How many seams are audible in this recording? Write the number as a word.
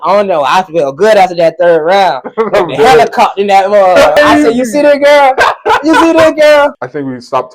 two